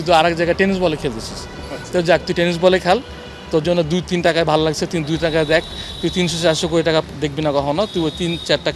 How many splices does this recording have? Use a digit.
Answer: 0